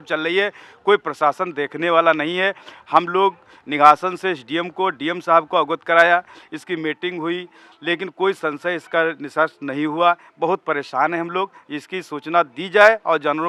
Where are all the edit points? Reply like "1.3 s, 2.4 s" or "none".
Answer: none